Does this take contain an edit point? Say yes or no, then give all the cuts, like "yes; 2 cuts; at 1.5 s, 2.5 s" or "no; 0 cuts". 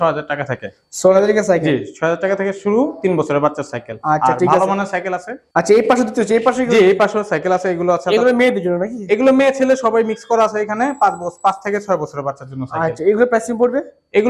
no; 0 cuts